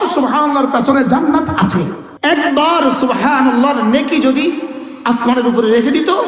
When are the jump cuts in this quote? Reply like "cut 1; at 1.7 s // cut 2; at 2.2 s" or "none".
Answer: cut 1; at 2.0 s